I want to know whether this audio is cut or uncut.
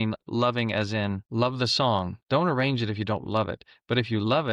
cut